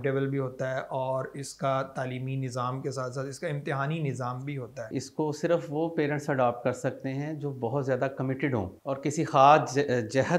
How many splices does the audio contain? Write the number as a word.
two